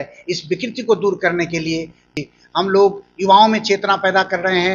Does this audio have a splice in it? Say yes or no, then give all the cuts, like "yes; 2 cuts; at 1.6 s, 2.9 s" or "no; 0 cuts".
yes; 1 cut; at 2.1 s